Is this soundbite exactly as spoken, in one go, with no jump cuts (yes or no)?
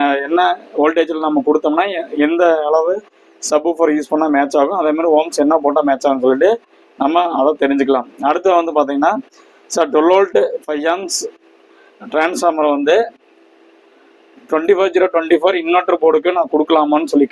yes